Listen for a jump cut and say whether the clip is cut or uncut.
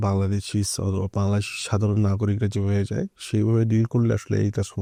uncut